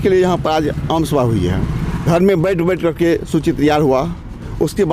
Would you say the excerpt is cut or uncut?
cut